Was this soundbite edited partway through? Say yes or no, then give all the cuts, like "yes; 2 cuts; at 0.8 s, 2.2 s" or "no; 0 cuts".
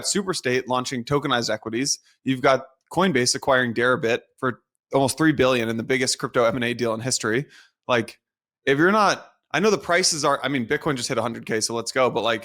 no; 0 cuts